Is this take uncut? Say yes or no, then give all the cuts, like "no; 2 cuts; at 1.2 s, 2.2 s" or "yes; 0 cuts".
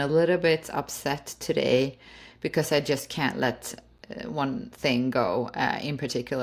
yes; 0 cuts